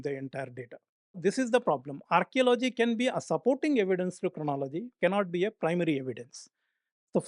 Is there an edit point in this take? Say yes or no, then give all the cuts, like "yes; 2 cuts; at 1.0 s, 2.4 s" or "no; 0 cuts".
yes; 1 cut; at 1.2 s